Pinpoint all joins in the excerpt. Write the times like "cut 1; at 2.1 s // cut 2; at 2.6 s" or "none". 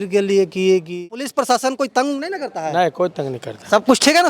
cut 1; at 1.0 s